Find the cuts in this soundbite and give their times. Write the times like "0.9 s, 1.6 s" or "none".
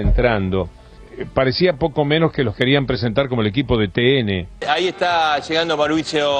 none